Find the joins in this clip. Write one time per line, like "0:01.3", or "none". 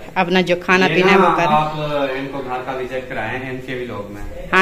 none